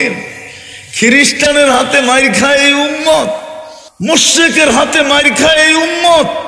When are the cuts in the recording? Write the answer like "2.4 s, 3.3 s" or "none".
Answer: 4.1 s